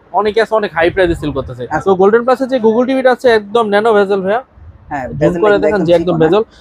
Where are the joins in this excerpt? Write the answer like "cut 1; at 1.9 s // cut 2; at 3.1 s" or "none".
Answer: cut 1; at 1.7 s

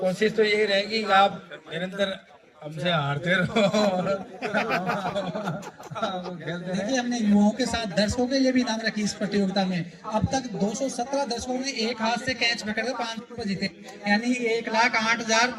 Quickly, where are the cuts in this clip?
cut 1; at 6.8 s

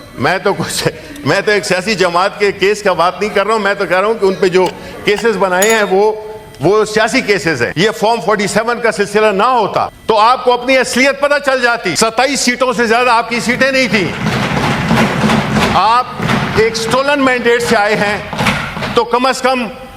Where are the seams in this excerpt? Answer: cut 1; at 7.7 s // cut 2; at 9.9 s // cut 3; at 11.9 s // cut 4; at 16.2 s

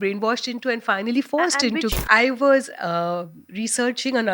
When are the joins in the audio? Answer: cut 1; at 1.9 s

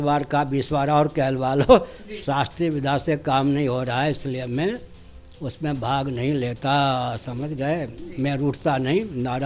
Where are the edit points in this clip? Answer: none

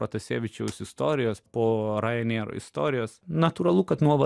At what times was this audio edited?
cut 1; at 1.4 s // cut 2; at 3.2 s

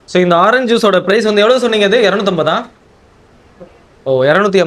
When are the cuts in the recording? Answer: none

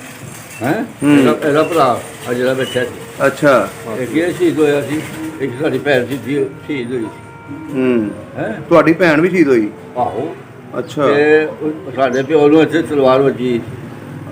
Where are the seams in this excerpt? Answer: none

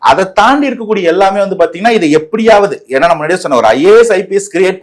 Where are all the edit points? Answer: none

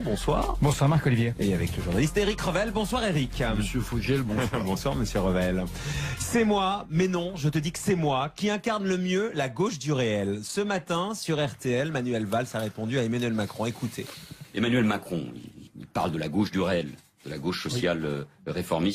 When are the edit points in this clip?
none

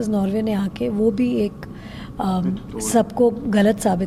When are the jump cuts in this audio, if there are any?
none

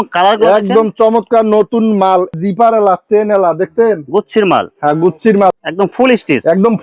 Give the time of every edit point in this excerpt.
cut 1; at 2.3 s // cut 2; at 5.5 s

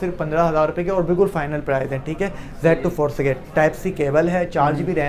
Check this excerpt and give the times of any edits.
none

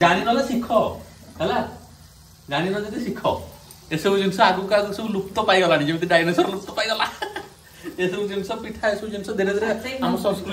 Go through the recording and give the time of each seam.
none

